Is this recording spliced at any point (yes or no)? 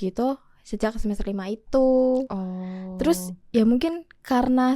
no